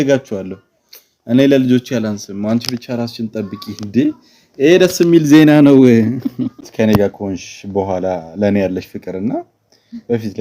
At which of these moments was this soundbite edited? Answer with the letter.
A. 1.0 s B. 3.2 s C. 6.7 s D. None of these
C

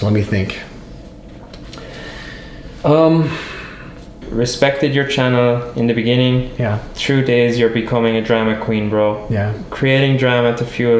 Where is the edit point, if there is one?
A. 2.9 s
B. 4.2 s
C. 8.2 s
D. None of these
B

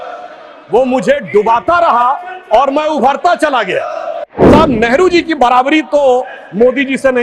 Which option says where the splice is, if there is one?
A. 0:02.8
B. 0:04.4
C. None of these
B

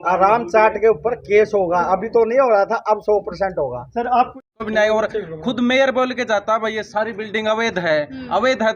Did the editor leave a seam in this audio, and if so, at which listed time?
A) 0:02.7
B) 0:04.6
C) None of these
B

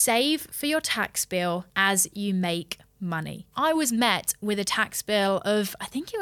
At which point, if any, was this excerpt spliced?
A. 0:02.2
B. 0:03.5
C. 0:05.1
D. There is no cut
B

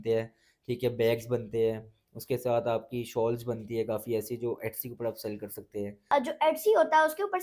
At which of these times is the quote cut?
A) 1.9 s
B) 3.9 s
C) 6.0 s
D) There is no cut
C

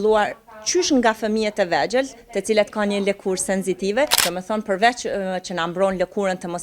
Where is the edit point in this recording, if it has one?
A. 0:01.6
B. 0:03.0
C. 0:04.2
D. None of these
C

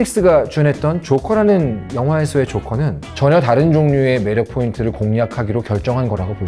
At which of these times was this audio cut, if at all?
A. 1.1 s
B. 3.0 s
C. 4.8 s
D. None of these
B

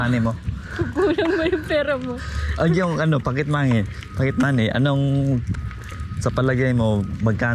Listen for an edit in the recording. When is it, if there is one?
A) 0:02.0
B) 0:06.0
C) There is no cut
C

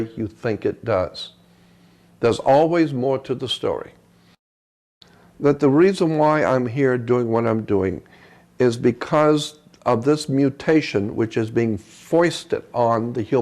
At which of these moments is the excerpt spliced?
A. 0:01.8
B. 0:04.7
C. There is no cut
B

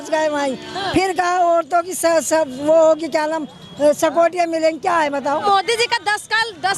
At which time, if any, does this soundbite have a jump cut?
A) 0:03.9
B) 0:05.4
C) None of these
B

